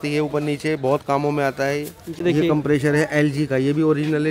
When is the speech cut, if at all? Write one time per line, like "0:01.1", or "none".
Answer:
0:02.0